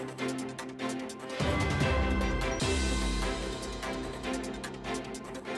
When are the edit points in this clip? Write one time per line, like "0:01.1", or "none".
none